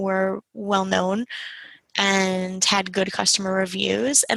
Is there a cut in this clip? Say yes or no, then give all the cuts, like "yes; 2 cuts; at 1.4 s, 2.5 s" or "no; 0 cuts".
no; 0 cuts